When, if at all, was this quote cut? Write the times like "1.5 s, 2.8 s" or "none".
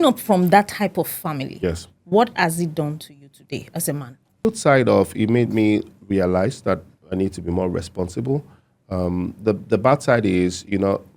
4.4 s